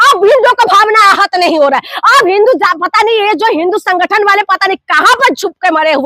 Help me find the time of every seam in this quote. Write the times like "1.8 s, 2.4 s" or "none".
none

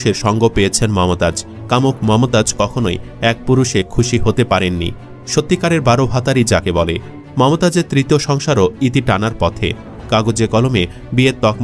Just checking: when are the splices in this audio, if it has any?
1.5 s, 7.2 s

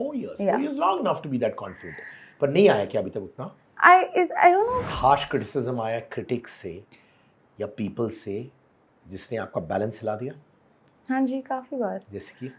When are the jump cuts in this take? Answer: 4.8 s

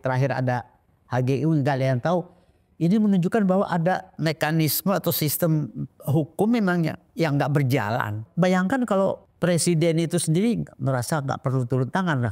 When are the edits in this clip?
4.1 s, 8.2 s, 9.3 s

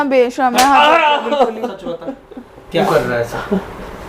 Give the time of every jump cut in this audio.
2.8 s

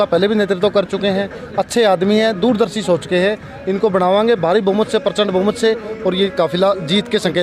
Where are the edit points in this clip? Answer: none

